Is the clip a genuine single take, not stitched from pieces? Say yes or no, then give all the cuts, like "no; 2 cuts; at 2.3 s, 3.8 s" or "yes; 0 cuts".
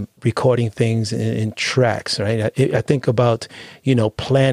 yes; 0 cuts